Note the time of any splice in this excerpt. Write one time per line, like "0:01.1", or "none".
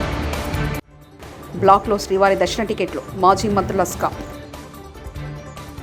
none